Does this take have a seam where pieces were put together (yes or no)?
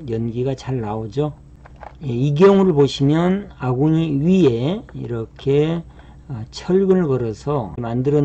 no